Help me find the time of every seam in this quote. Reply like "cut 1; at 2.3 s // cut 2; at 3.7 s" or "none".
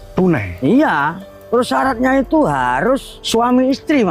cut 1; at 3.1 s